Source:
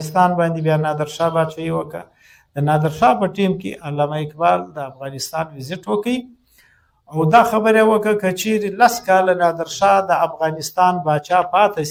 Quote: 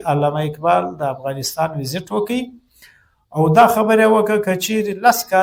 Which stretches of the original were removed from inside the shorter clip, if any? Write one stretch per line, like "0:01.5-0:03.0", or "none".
none